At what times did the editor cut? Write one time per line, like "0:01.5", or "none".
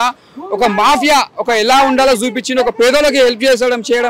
none